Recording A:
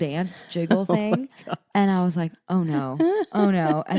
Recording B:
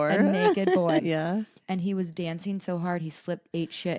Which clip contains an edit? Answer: B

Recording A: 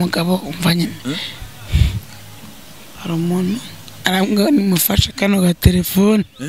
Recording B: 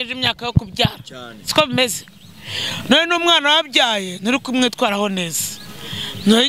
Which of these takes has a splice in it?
A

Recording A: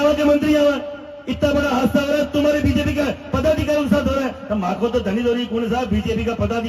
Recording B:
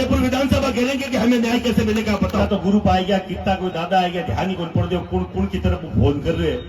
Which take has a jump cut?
B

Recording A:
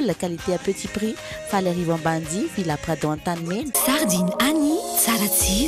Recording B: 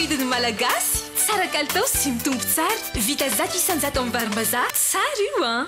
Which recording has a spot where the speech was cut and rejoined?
A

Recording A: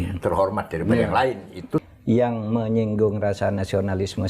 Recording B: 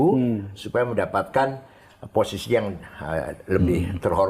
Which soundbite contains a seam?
A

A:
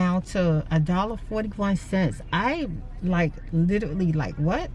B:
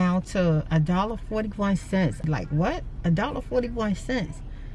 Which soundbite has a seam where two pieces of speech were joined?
B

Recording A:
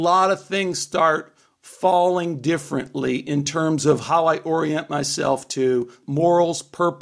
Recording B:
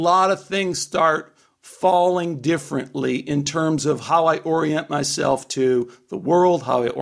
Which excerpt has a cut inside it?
A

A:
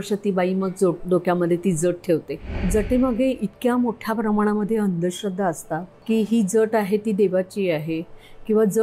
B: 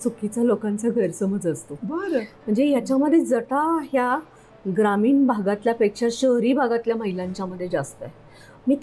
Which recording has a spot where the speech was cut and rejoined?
A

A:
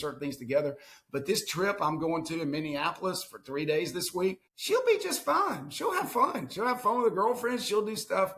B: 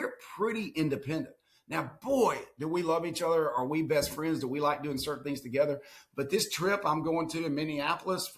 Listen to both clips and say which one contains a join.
A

